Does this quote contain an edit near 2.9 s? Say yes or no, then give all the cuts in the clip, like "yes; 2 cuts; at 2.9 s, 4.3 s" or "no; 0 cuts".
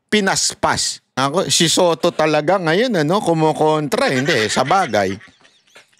no; 1 cut; at 1.2 s